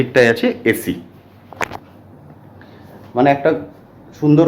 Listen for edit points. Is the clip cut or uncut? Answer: uncut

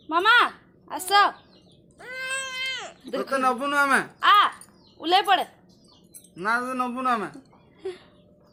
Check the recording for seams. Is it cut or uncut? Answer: uncut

